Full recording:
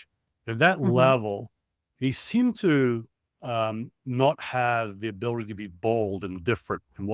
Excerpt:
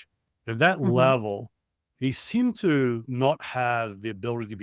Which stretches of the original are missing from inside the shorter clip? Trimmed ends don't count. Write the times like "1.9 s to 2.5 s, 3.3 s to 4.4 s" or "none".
3.1 s to 4.0 s